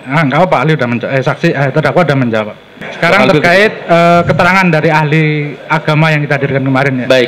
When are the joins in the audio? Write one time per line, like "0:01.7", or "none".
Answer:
0:02.7